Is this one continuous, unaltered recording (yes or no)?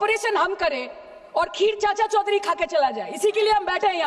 yes